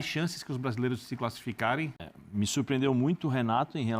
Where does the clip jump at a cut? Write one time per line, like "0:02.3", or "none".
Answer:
0:02.1